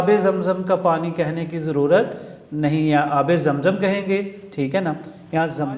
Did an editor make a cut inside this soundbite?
no; 0 cuts

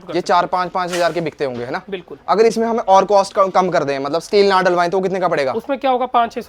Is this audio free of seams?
yes; 0 cuts

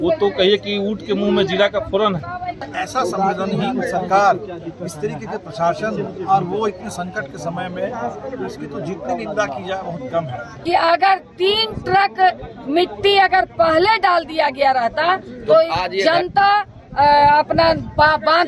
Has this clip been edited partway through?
yes; 2 cuts; at 2.7 s, 10.5 s

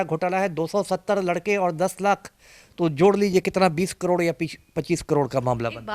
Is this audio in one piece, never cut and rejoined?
yes; 0 cuts

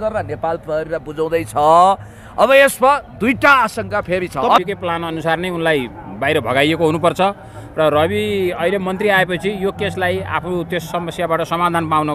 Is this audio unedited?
no; 1 cut; at 4.6 s

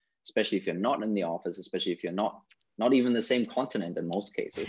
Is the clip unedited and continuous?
yes; 0 cuts

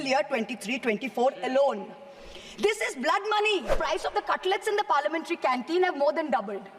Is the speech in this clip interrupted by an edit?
yes; 1 cut; at 3.7 s

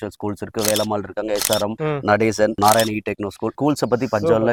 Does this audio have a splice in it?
no; 0 cuts

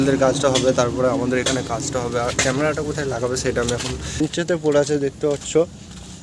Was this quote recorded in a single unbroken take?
no; 1 cut; at 4.2 s

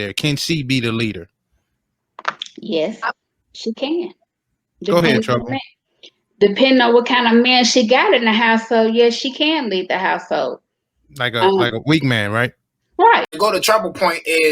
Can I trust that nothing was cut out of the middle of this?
no; 1 cut; at 13.3 s

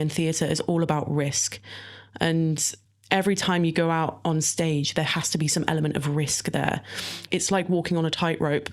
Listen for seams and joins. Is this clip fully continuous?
no; 1 cut; at 6.9 s

